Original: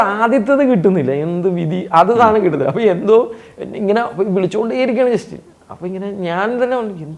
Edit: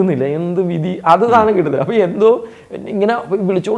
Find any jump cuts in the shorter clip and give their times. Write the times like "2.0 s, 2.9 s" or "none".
none